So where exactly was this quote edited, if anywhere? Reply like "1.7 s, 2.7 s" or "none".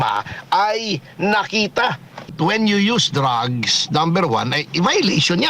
2.3 s